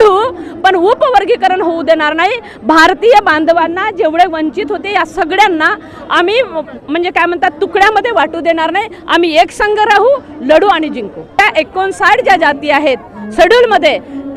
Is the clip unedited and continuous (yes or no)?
no